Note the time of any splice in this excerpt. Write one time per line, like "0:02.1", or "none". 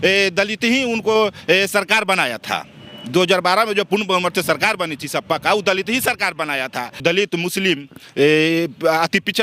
0:07.0